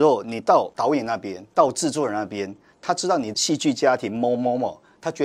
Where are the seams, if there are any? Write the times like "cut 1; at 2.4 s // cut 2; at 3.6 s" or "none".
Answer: cut 1; at 3.3 s

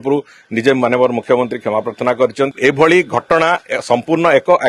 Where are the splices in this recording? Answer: cut 1; at 2.5 s

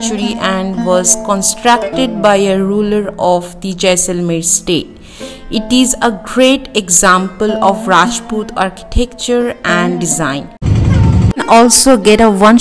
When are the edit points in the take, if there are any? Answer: cut 1; at 10.6 s

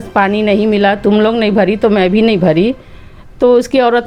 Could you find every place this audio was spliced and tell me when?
none

